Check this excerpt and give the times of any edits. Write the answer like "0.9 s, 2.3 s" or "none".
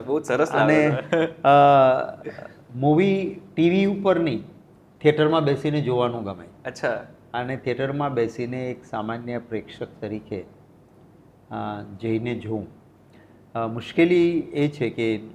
none